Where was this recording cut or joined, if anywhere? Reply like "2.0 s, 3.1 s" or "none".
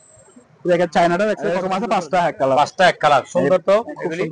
1.6 s